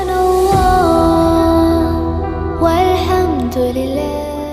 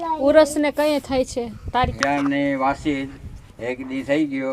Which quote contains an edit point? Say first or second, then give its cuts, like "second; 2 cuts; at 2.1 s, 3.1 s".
second; 1 cut; at 1.9 s